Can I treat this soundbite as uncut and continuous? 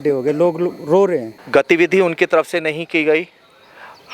no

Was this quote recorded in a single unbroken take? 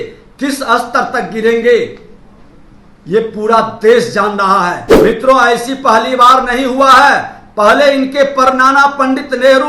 no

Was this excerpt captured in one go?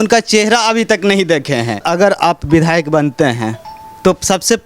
no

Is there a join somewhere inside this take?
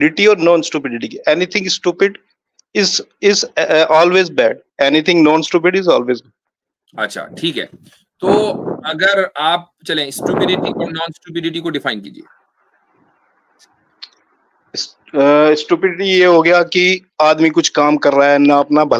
no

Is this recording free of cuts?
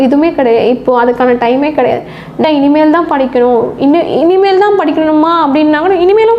no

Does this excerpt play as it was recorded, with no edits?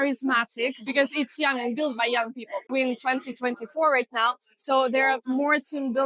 no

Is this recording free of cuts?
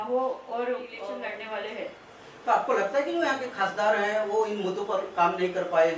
no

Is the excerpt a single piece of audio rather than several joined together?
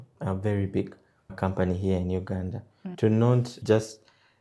no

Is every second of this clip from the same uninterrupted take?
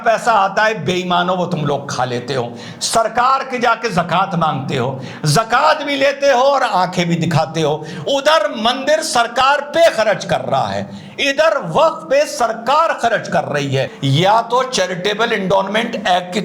no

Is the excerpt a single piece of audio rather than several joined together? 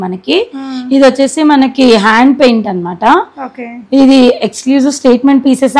yes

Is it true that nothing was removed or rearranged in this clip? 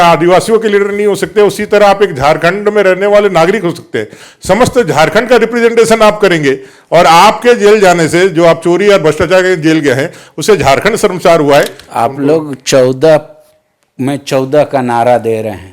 no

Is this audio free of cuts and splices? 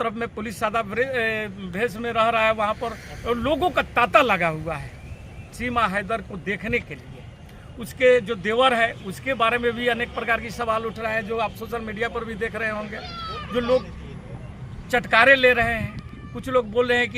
yes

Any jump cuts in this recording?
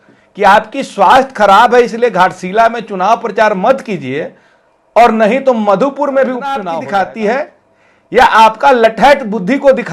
yes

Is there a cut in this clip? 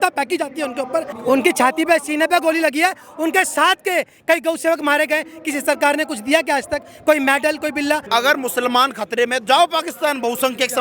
yes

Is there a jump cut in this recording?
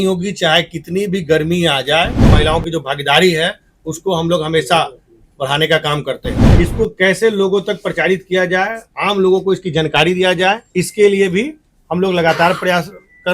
yes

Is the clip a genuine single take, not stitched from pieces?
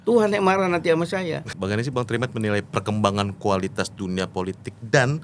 no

